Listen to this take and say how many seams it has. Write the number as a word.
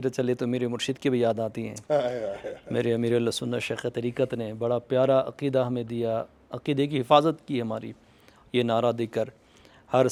zero